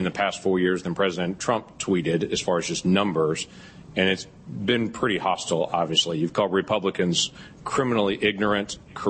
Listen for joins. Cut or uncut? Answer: uncut